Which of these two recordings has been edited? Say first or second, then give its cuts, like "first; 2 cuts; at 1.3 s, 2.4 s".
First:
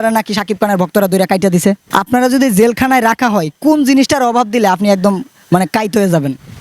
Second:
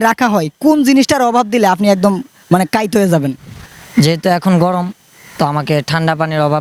first; 1 cut; at 1.8 s